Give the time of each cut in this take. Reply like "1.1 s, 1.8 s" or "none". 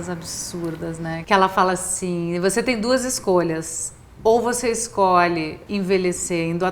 1.2 s, 5.6 s